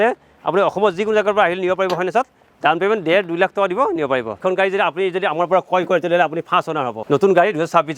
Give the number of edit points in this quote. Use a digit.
2